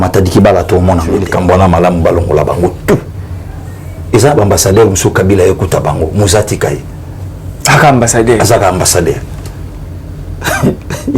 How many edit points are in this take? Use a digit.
1